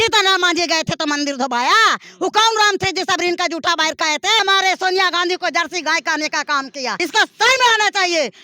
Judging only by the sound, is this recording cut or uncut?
cut